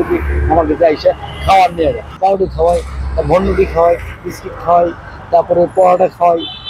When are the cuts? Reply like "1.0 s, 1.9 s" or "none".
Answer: 2.1 s

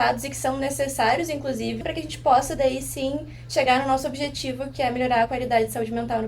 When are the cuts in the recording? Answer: 1.8 s

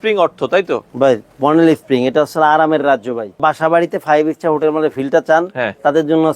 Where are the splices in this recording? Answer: 3.4 s

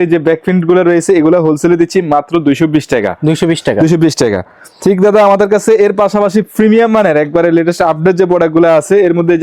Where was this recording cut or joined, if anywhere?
none

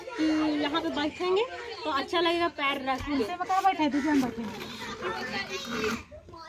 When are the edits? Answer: none

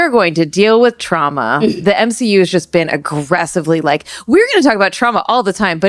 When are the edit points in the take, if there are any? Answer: 1.7 s

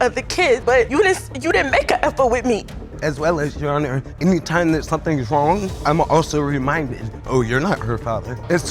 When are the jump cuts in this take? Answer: 2.8 s

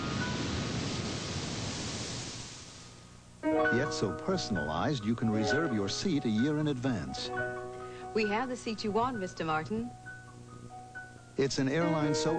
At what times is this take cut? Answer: 7.6 s

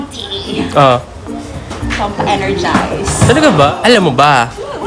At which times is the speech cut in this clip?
3.7 s

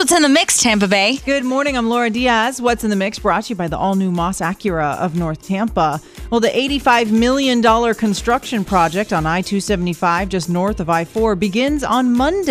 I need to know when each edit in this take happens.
1.2 s

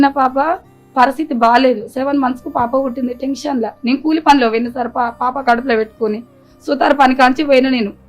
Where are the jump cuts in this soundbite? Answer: none

